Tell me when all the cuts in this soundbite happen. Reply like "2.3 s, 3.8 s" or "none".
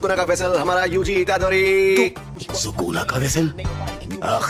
2.3 s